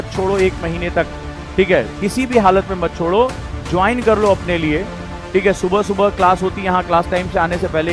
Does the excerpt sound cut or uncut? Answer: uncut